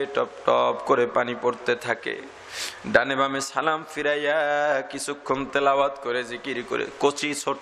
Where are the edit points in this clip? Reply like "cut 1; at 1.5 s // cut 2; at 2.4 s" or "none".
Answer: none